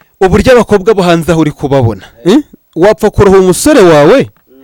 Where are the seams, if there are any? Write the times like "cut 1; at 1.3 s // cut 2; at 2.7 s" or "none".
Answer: none